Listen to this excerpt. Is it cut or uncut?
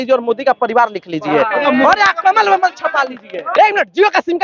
cut